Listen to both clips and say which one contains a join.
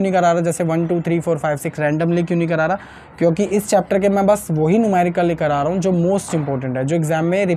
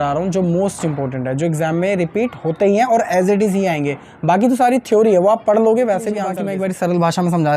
second; 1 cut; at 6.4 s

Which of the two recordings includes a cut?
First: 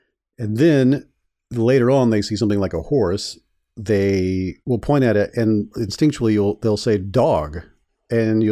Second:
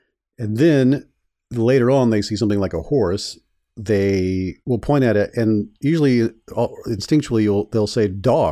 first; 1 cut; at 5.7 s

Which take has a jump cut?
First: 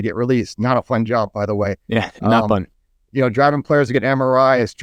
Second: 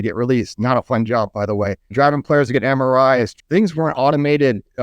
second; 2 cuts; at 1.9 s, 3.3 s

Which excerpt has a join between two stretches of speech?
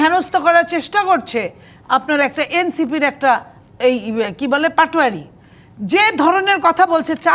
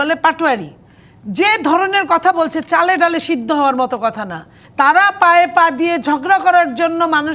second; 1 cut; at 4.6 s

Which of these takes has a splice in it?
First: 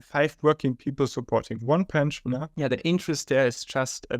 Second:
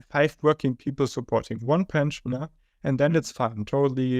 first; 1 cut; at 2.5 s

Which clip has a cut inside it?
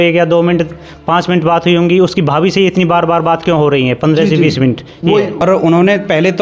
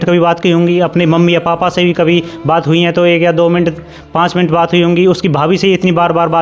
first; 1 cut; at 5.3 s

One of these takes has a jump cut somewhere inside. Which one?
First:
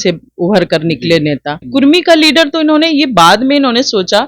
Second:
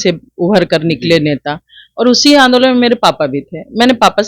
first; 1 cut; at 1.6 s

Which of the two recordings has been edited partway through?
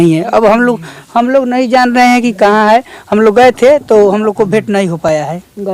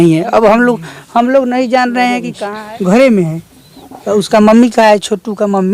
second; 1 cut; at 2.3 s

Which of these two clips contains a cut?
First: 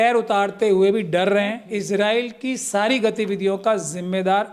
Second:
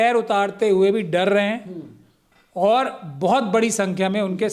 first; 1 cut; at 1.7 s

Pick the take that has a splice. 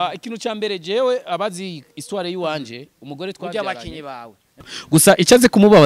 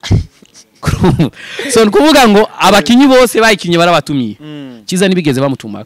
first; 1 cut; at 4.7 s

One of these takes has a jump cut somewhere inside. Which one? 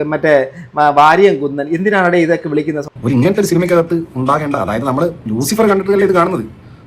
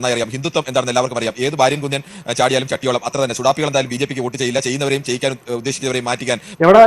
first; 1 cut; at 2.8 s

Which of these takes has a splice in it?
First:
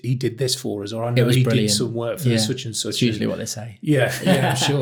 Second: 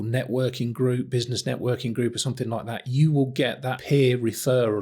second; 1 cut; at 3.7 s

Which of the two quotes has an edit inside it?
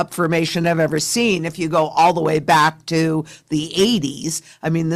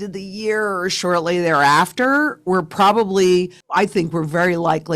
second; 1 cut; at 3.6 s

